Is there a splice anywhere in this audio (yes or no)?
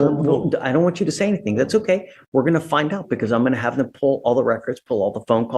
no